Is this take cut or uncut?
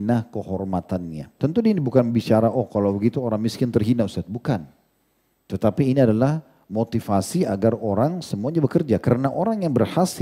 cut